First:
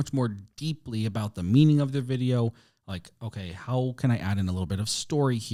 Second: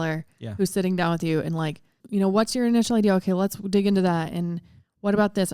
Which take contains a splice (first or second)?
second